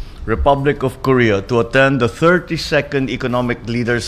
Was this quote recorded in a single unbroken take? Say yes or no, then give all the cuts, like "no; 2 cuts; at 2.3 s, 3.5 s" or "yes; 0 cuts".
yes; 0 cuts